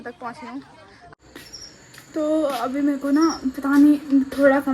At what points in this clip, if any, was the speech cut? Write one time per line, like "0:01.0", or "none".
0:01.1